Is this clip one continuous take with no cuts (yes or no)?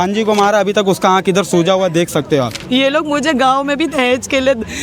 no